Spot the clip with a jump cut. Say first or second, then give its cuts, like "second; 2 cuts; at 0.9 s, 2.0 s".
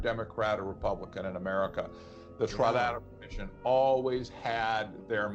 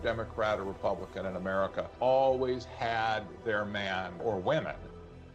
second; 2 cuts; at 1.8 s, 4.2 s